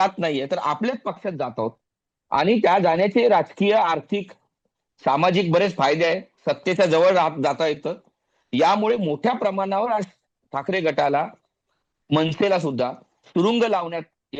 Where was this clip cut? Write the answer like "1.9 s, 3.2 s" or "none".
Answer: none